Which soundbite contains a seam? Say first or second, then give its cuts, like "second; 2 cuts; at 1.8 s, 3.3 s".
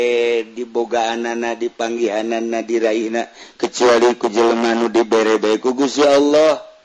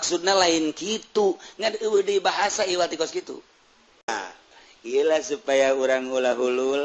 second; 1 cut; at 4.1 s